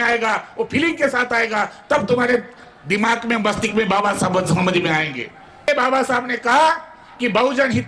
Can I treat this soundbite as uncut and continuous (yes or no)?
no